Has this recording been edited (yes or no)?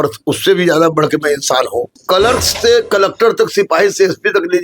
yes